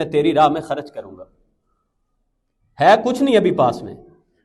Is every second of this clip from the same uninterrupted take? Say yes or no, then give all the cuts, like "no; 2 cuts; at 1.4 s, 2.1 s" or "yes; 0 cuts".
yes; 0 cuts